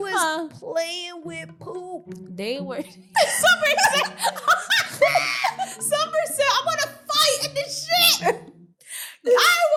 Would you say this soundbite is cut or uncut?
uncut